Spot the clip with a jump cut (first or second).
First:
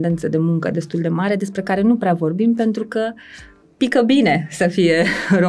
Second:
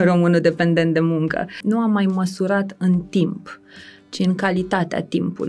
second